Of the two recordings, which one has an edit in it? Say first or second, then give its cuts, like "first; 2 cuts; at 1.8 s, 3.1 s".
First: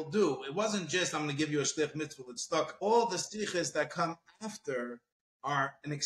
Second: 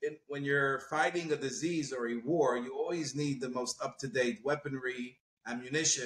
first; 1 cut; at 2.9 s